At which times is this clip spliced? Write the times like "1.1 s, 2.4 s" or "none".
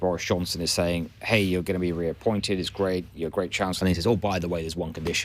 3.7 s